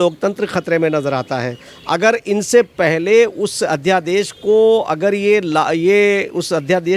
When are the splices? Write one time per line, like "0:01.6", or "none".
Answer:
none